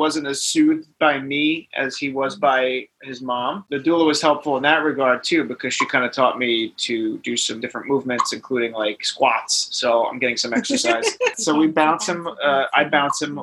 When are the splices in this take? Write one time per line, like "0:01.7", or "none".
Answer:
0:03.7
0:07.6
0:11.3